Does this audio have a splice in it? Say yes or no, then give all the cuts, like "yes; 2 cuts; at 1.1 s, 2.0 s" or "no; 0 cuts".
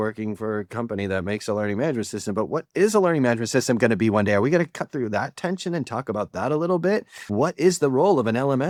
no; 0 cuts